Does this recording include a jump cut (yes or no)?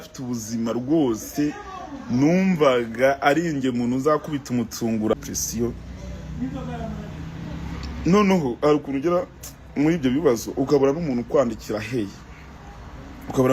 yes